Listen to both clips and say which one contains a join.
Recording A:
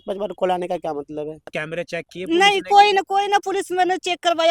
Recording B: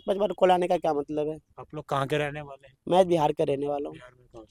A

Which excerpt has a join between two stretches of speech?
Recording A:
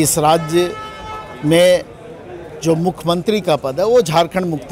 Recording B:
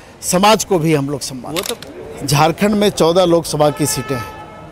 B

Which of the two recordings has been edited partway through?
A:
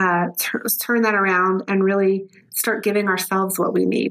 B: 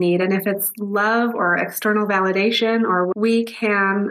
B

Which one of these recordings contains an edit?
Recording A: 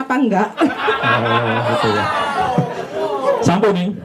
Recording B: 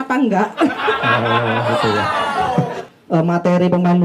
B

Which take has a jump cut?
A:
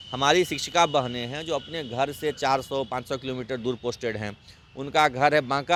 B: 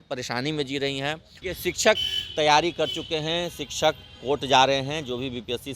B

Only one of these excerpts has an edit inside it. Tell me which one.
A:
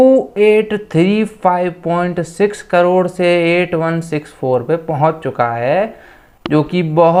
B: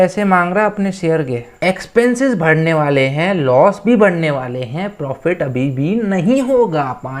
B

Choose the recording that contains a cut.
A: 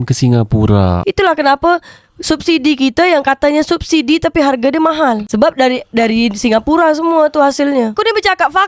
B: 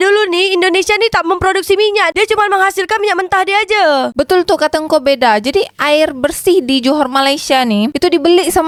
A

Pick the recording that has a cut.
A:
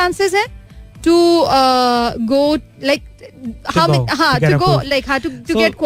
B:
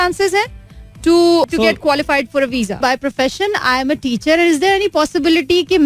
B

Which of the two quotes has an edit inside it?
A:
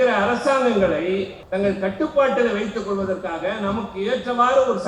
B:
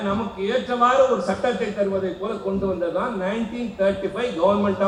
A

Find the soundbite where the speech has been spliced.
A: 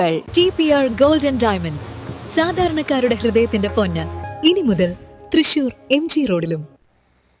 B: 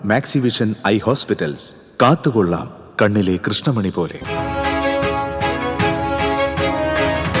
B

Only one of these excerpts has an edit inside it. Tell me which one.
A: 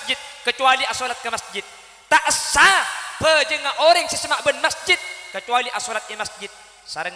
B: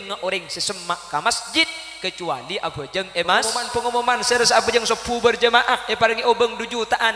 B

